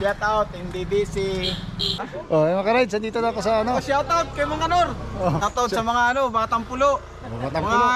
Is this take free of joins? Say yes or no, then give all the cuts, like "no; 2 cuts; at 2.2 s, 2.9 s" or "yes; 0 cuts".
no; 2 cuts; at 1.9 s, 5.4 s